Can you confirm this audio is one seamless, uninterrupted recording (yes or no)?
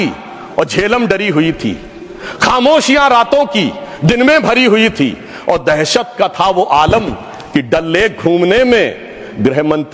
yes